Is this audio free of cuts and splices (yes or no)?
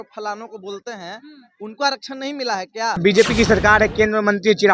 no